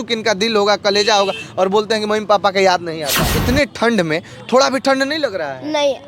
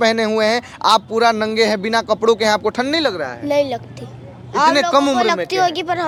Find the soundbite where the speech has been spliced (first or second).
first